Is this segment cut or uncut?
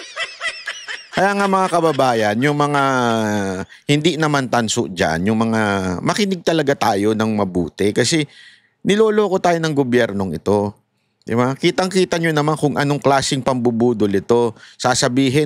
cut